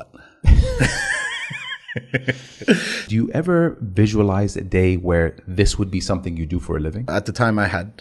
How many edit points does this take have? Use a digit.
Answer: 2